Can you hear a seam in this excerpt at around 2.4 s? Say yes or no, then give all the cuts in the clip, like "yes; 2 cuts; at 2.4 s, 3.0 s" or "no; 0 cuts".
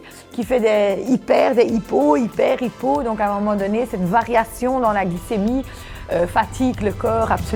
no; 0 cuts